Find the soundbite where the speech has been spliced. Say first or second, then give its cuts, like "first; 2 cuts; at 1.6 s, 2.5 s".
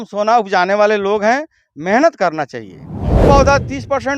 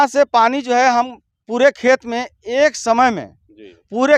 first; 1 cut; at 3.2 s